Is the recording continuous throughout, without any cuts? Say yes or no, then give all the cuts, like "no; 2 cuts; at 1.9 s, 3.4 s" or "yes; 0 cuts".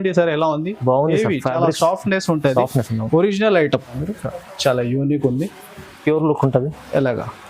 no; 1 cut; at 4.0 s